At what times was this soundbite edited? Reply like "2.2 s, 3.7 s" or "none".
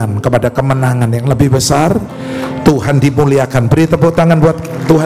none